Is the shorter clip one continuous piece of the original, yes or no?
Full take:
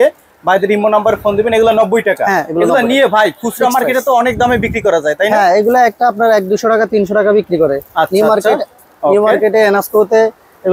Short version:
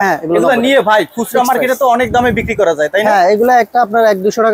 yes